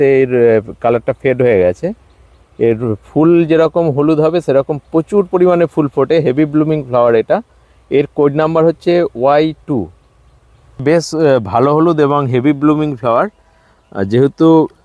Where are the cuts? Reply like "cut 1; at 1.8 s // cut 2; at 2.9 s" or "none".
cut 1; at 10.8 s